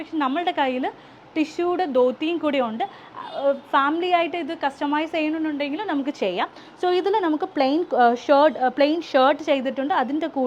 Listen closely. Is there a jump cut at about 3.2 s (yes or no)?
no